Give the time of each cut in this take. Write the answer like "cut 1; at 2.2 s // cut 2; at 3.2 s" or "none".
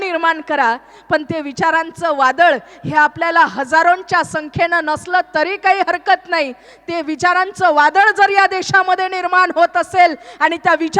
none